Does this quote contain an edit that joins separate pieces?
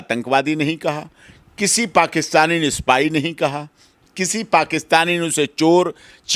no; 0 cuts

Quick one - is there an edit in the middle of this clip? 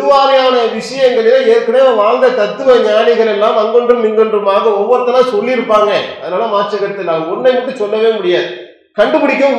no; 0 cuts

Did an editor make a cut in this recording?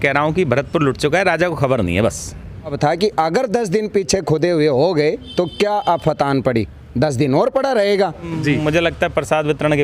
yes; 2 cuts; at 2.8 s, 8.3 s

